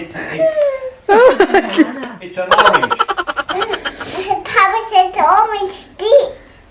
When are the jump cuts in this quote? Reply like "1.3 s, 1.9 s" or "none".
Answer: none

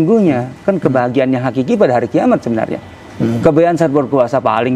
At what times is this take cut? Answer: none

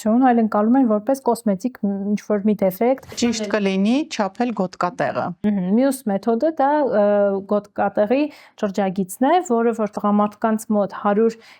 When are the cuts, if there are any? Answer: 3.5 s

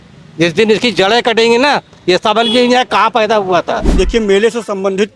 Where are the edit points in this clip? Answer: 3.9 s

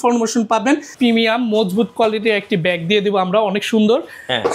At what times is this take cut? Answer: 0.9 s

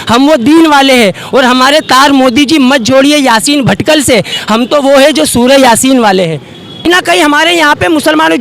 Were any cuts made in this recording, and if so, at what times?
6.9 s

